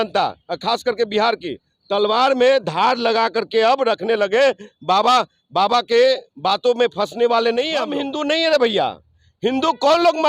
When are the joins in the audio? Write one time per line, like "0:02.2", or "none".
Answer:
0:07.9